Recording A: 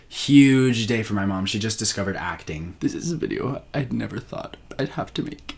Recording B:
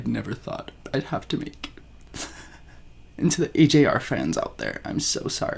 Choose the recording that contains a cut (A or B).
A